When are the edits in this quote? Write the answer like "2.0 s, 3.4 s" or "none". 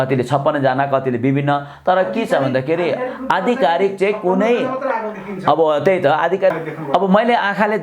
6.5 s